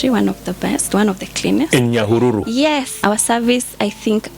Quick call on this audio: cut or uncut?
cut